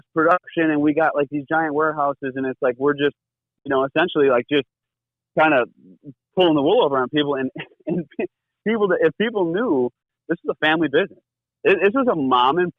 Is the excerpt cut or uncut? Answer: cut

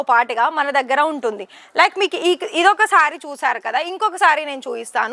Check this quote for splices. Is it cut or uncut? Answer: uncut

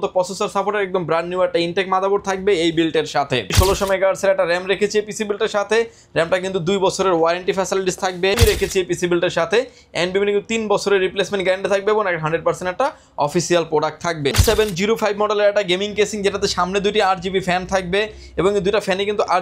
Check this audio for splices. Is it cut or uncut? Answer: cut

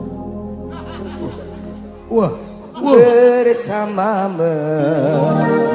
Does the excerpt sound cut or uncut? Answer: uncut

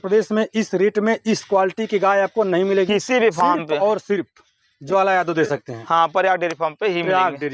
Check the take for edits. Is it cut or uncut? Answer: uncut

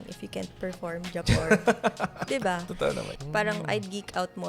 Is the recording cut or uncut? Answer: cut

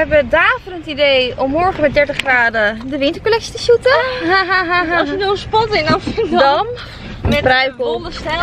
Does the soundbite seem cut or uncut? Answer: uncut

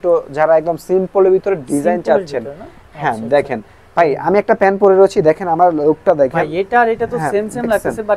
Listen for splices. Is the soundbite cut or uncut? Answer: uncut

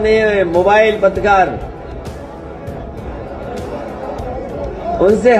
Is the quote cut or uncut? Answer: uncut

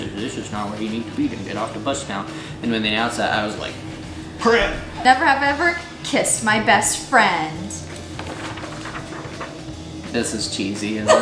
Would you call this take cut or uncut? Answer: uncut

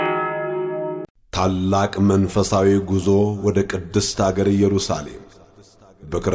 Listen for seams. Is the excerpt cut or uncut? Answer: cut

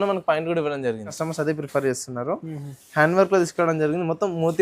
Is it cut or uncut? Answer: cut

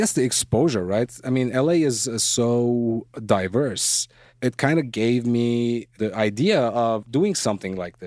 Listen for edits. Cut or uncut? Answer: cut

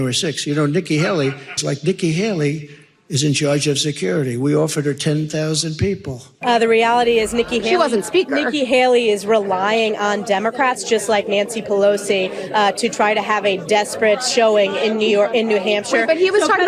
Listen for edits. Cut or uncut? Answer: cut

